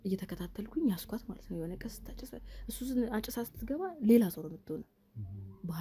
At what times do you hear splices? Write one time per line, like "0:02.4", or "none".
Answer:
none